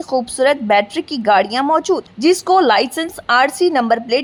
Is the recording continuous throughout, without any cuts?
yes; 0 cuts

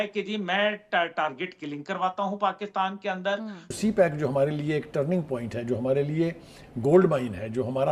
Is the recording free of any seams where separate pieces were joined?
no; 1 cut; at 3.7 s

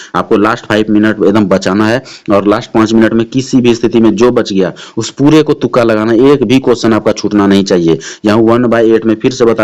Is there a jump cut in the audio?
no; 0 cuts

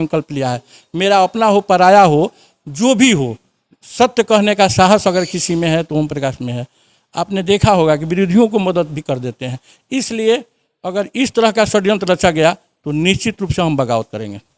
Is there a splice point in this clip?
no; 0 cuts

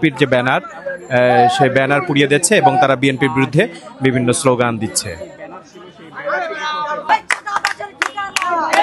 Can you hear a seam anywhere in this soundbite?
yes; 1 cut; at 7.1 s

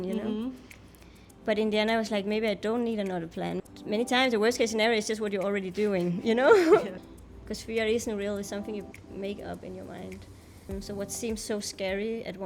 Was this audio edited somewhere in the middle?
yes; 3 cuts; at 3.6 s, 7.0 s, 10.7 s

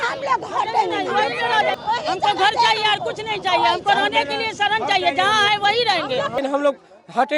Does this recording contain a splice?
yes; 2 cuts; at 1.8 s, 6.3 s

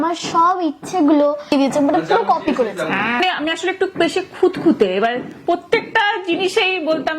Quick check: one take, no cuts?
no; 2 cuts; at 1.5 s, 3.2 s

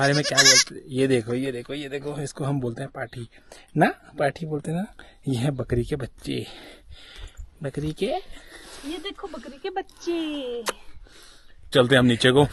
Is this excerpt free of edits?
yes; 0 cuts

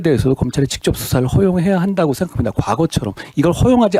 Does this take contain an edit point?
no; 0 cuts

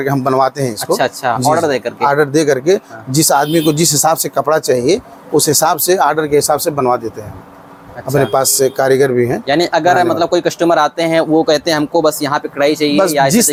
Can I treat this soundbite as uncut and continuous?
yes; 0 cuts

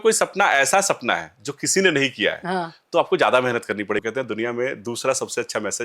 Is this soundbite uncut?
no; 1 cut; at 4.0 s

